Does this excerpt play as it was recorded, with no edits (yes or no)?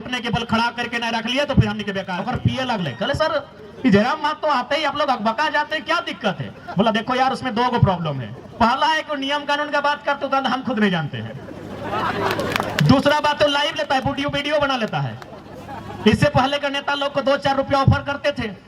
no